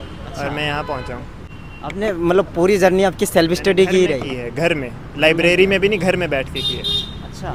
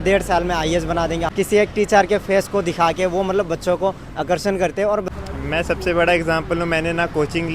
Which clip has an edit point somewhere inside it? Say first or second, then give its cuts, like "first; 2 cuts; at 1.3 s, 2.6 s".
second; 2 cuts; at 1.3 s, 5.0 s